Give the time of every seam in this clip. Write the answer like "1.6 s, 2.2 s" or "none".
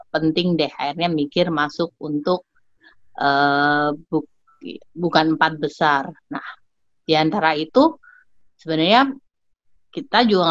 none

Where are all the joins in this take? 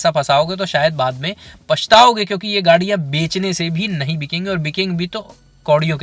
none

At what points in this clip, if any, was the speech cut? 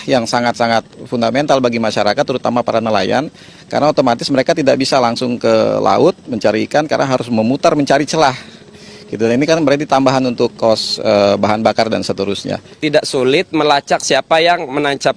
12.7 s

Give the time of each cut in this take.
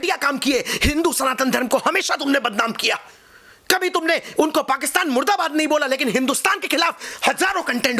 none

